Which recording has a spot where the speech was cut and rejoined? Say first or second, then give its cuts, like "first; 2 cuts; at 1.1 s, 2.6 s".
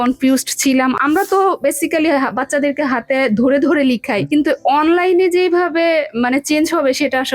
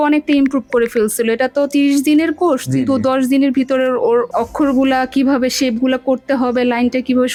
first; 2 cuts; at 1.0 s, 4.3 s